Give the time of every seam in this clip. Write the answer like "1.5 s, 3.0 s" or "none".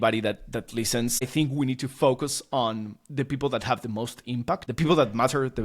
1.3 s, 4.7 s